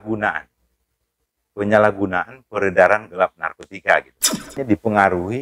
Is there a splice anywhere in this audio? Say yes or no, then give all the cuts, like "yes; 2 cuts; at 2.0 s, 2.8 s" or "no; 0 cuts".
yes; 1 cut; at 4.5 s